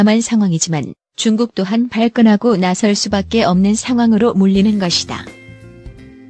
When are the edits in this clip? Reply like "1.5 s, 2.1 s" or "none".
none